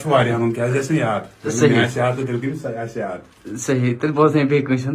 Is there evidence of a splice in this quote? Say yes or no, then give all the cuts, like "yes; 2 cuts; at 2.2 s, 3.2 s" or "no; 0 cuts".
no; 0 cuts